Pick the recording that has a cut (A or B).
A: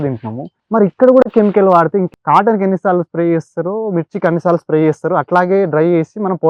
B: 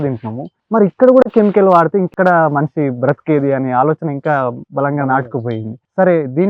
A